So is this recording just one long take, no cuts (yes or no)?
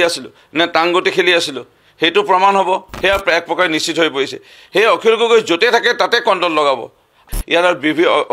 no